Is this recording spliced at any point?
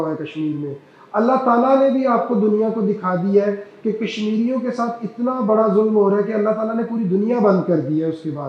no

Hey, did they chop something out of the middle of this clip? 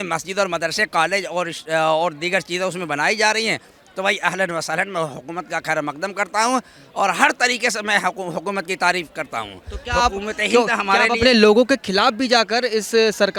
no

